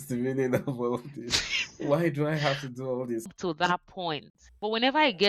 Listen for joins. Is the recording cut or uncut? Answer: cut